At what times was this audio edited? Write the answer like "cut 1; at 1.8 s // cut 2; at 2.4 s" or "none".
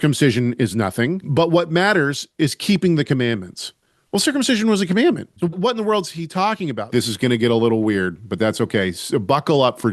cut 1; at 1.2 s // cut 2; at 5.6 s // cut 3; at 6.8 s